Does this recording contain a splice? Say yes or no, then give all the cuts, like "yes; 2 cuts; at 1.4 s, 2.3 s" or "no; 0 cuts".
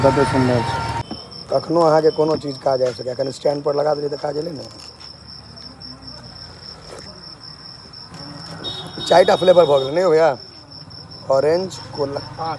yes; 1 cut; at 1.0 s